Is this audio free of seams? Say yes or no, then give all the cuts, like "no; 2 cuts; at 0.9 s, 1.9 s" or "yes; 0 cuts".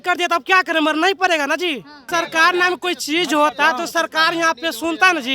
no; 1 cut; at 2.0 s